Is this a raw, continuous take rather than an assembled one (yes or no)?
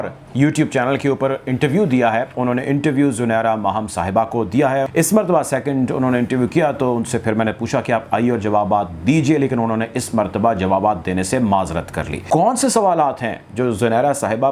no